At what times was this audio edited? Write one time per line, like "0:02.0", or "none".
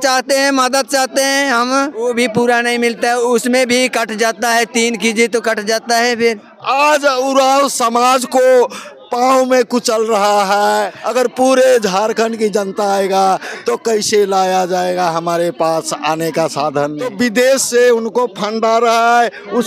0:02.1
0:06.5
0:11.0
0:17.0

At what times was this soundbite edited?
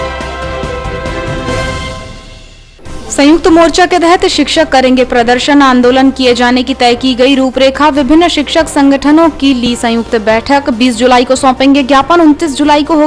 none

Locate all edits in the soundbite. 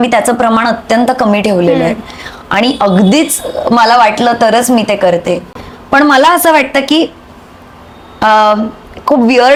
none

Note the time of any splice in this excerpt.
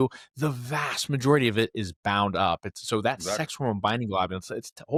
none

